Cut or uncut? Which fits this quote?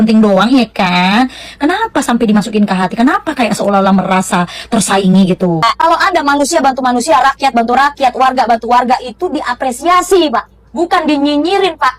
cut